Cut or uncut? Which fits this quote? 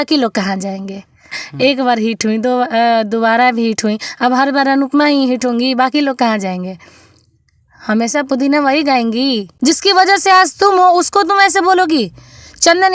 cut